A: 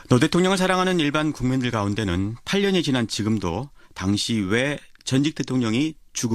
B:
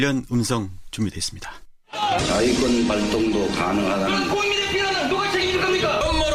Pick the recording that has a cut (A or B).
A